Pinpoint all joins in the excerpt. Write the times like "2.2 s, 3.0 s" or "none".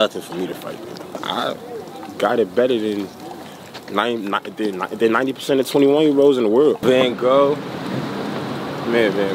1.2 s, 6.8 s